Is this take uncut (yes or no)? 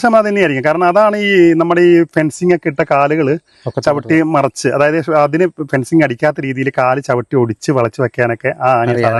yes